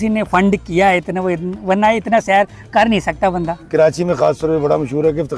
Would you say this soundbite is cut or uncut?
cut